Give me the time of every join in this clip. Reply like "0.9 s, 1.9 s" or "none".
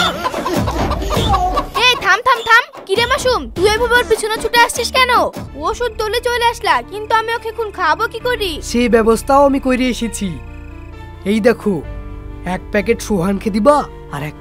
5.3 s